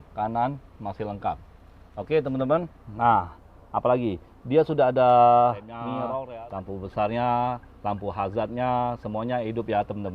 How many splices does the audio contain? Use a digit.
1